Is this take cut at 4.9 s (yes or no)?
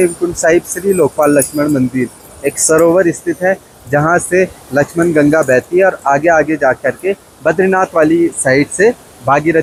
no